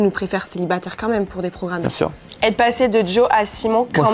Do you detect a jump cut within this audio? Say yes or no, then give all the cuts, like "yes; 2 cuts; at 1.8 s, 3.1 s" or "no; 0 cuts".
yes; 1 cut; at 2.2 s